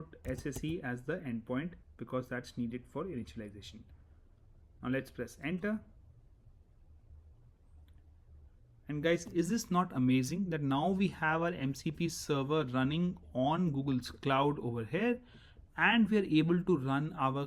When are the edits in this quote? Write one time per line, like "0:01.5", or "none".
none